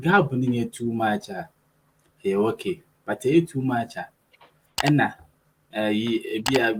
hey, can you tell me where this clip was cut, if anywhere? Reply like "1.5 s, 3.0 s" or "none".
none